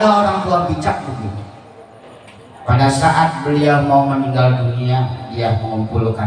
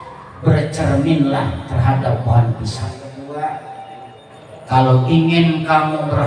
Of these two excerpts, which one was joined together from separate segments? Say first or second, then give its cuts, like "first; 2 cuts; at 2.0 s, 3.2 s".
second; 1 cut; at 3.1 s